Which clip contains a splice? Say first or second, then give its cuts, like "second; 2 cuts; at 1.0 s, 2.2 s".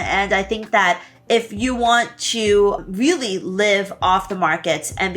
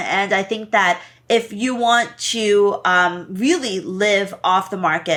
first; 1 cut; at 2.8 s